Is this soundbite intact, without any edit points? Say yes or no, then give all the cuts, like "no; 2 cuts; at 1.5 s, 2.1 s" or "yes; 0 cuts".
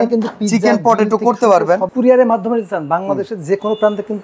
no; 1 cut; at 1.9 s